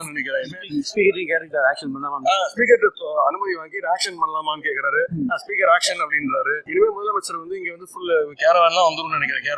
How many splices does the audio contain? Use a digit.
1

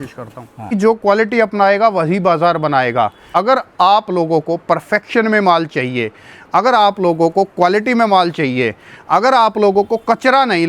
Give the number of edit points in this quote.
2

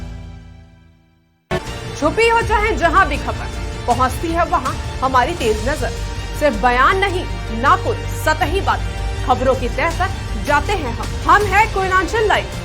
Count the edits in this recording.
1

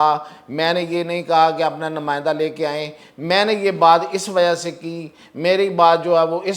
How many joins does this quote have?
0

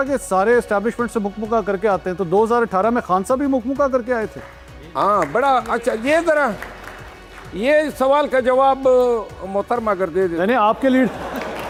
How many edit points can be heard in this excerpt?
0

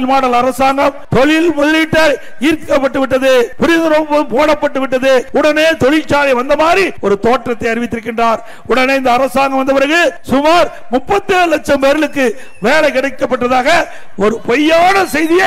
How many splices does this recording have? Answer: 5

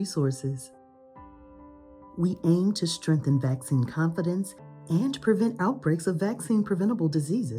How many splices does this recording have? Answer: 2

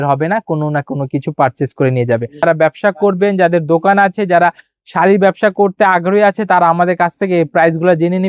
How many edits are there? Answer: 1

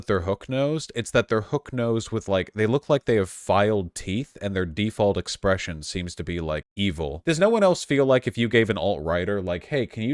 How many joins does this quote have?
1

